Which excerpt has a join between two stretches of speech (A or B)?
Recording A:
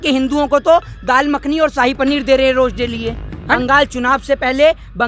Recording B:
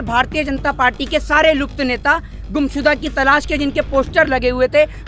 A